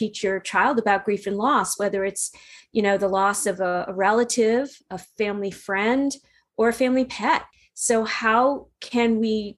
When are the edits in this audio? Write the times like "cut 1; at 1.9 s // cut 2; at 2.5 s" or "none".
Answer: none

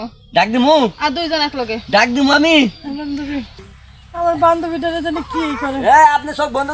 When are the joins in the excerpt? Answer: cut 1; at 3.6 s

